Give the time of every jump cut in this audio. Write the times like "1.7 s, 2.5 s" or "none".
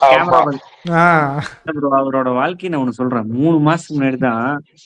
1.6 s